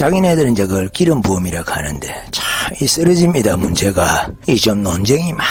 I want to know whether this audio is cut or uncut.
uncut